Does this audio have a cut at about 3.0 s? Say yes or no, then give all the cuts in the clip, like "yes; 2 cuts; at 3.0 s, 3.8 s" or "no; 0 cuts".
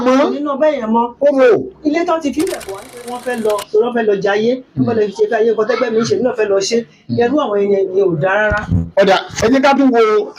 yes; 1 cut; at 3.0 s